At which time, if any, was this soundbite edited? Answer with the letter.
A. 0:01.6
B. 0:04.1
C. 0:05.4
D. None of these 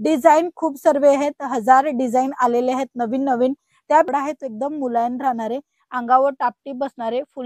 B